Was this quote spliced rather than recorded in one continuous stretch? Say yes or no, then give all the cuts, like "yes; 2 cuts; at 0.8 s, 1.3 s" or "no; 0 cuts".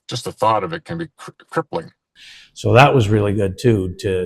yes; 1 cut; at 2.0 s